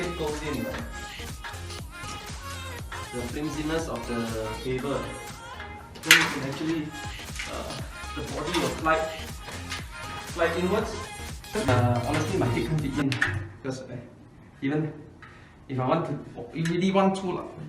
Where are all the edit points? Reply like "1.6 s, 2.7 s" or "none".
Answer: 11.7 s